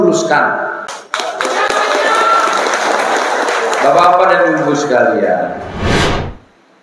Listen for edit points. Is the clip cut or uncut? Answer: cut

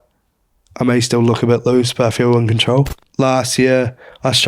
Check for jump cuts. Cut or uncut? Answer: cut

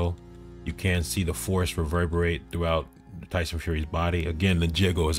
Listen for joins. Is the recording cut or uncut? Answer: uncut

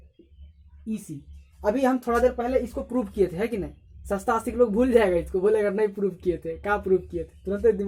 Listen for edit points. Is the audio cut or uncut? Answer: uncut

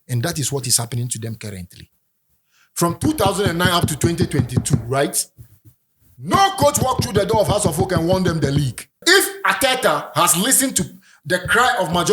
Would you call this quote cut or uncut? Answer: cut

